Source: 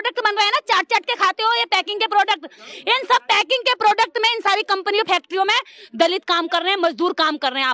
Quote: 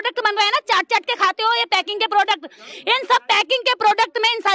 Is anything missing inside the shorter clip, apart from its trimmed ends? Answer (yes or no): no